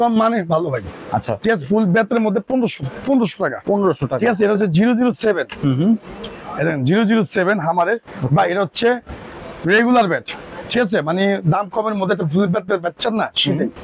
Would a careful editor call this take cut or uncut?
uncut